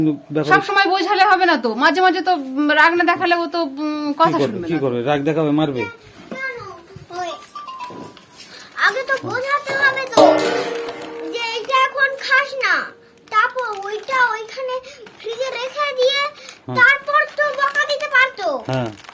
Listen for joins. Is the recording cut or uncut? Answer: cut